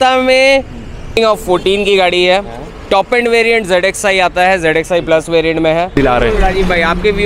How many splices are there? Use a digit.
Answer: 2